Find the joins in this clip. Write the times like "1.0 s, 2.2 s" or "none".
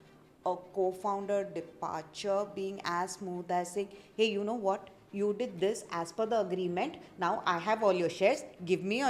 none